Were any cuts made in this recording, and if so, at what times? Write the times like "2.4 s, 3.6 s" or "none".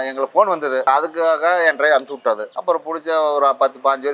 0.9 s, 2.5 s